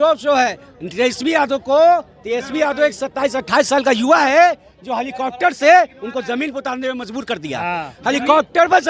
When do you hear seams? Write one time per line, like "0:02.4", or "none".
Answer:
none